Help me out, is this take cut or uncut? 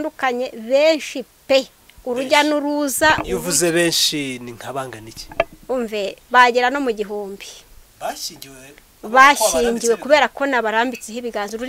uncut